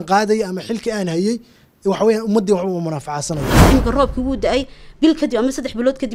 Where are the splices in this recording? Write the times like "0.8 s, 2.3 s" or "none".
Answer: 3.6 s